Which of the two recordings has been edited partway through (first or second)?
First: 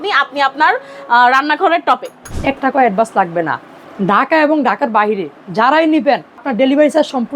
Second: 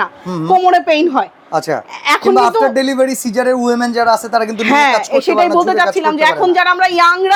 first